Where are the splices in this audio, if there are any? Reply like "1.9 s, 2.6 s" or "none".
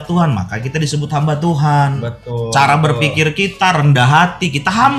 none